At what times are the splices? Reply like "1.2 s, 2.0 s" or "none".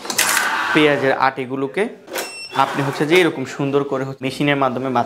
2.1 s, 4.1 s